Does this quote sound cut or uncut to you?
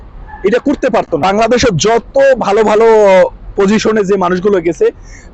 cut